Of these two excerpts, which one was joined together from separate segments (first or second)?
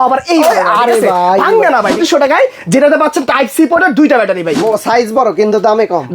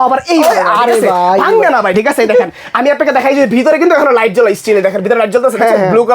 first